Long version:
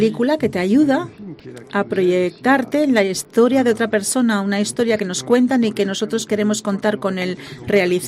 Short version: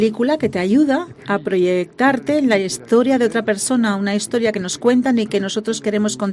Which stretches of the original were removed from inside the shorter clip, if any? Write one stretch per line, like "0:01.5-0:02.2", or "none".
0:01.1-0:01.6

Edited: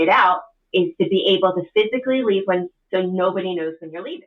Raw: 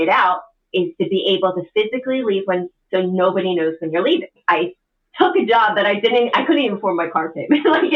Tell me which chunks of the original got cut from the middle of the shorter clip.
none

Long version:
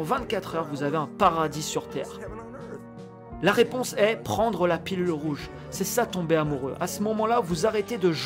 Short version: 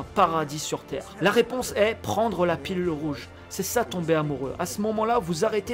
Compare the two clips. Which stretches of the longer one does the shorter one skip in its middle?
0:02.0-0:03.2

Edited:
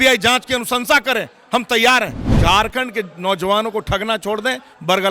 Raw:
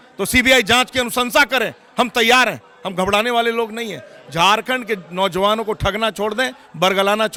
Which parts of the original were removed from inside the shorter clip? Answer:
0:02.7-0:04.2

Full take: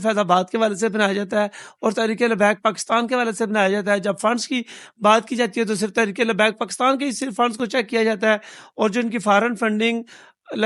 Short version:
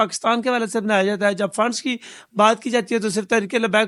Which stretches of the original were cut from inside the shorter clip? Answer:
none

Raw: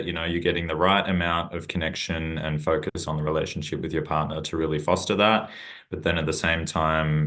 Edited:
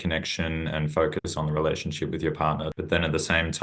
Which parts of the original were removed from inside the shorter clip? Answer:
0:04.4-0:05.8

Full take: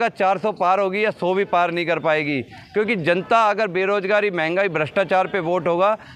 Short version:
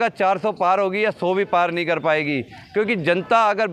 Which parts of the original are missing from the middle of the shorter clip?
none

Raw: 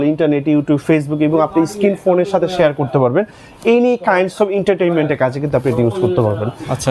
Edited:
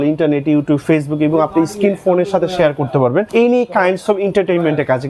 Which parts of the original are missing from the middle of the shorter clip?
0:03.3-0:03.6

